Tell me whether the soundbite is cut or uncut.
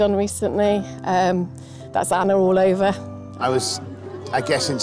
cut